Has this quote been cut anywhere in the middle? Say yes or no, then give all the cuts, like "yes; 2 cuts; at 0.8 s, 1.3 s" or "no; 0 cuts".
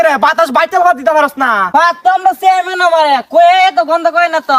yes; 1 cut; at 1.6 s